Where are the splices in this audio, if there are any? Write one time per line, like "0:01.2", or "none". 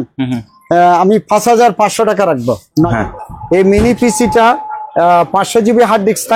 0:02.9

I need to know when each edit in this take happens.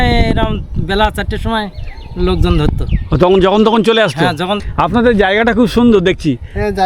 0:04.7

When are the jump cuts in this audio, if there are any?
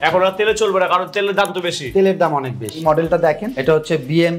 0:02.8
0:03.5

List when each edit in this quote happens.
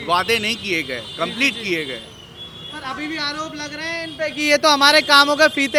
none

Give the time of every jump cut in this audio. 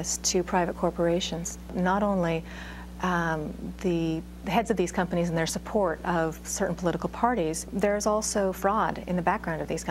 0:01.7
0:07.7

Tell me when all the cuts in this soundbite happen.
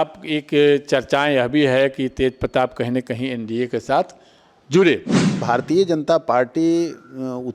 0:05.4

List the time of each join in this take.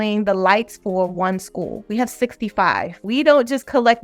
0:01.8
0:03.0

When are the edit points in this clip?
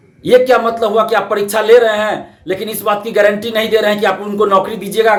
none

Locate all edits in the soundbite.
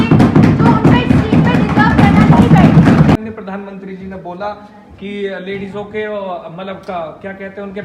0:03.2

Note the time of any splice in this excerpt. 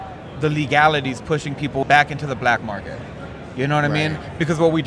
0:01.8

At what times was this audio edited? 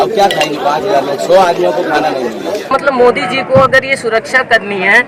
0:02.7

